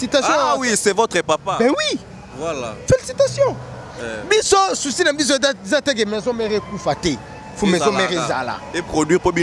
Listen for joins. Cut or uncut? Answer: uncut